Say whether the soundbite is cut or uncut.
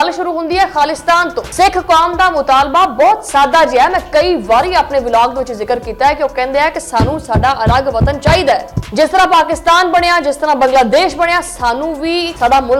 cut